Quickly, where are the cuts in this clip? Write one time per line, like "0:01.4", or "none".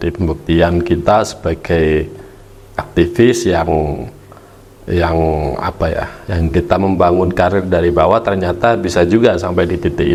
none